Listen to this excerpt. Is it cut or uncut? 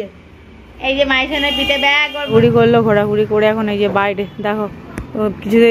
cut